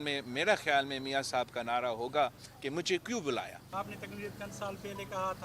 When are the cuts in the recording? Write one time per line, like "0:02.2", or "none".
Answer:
0:03.7